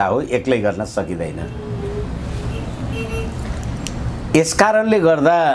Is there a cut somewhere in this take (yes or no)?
no